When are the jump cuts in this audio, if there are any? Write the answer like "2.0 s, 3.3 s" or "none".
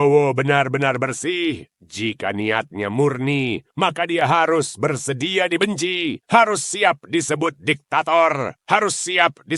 none